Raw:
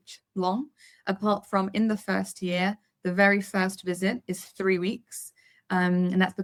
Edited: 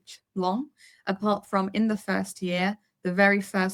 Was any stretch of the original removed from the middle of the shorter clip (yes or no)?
no